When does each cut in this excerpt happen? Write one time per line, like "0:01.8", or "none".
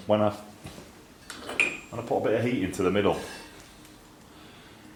none